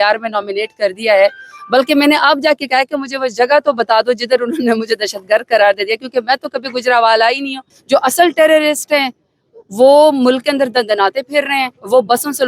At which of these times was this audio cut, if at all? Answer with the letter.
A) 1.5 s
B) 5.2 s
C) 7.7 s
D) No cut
C